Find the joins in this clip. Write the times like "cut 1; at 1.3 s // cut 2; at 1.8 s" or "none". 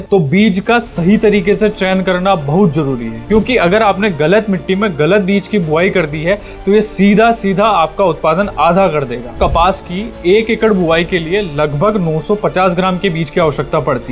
cut 1; at 9.4 s